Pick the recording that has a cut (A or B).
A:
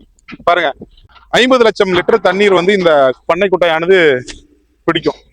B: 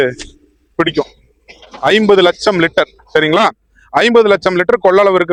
A